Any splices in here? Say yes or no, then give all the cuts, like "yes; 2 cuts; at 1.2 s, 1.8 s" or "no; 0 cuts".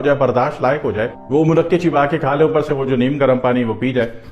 no; 0 cuts